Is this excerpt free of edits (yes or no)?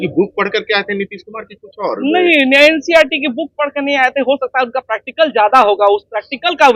yes